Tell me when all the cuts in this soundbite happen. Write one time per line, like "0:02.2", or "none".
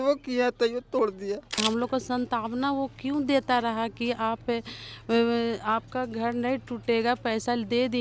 0:01.6